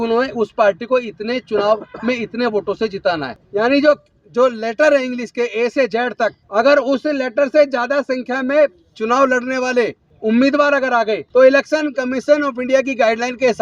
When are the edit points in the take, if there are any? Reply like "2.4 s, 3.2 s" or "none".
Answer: 3.3 s, 6.4 s, 10.1 s, 11.2 s